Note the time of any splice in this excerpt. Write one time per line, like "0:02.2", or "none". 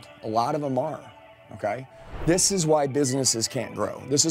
0:02.1